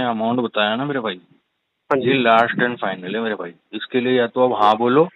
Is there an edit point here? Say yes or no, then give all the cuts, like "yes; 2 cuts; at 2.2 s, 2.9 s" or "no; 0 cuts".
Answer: no; 0 cuts